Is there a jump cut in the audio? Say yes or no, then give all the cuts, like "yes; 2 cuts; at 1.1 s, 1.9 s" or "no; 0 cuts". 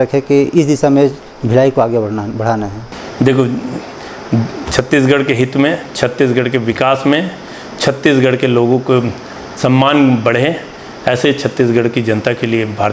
no; 0 cuts